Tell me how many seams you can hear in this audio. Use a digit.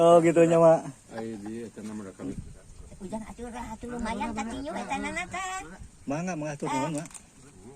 1